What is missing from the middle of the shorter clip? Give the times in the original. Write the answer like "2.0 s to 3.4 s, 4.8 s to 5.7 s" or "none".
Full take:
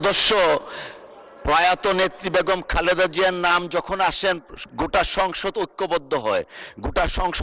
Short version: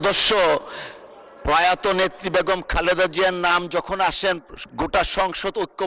none